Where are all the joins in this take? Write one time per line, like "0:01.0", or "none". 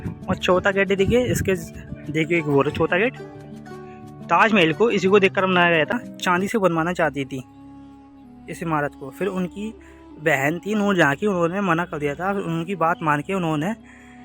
0:05.9